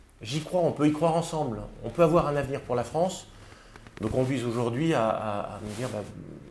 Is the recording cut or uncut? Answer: uncut